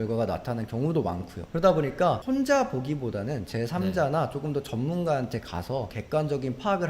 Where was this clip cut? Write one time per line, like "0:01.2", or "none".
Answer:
0:06.0